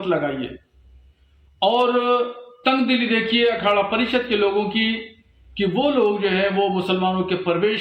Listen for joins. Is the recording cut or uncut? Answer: uncut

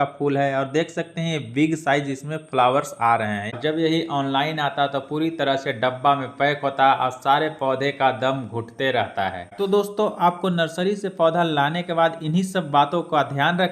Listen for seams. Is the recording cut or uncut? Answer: cut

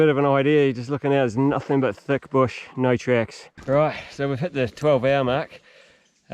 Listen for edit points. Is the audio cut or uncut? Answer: cut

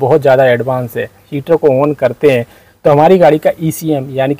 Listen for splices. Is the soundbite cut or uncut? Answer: cut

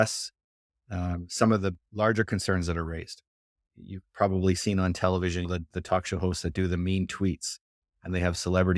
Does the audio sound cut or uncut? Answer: cut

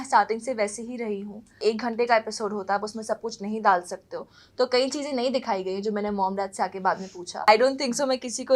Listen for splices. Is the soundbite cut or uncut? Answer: cut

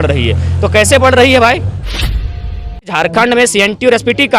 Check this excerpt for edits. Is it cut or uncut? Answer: cut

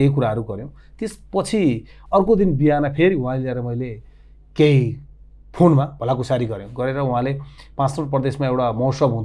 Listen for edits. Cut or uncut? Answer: uncut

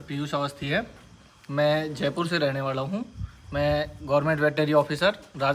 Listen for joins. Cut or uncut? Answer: uncut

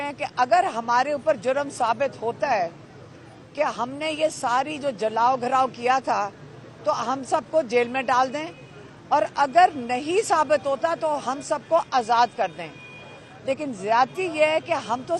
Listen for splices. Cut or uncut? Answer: uncut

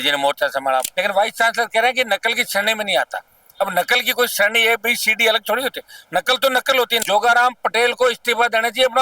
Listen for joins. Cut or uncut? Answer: cut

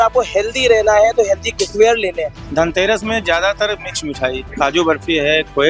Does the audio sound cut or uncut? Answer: cut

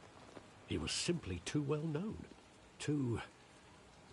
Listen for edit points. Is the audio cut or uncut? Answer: uncut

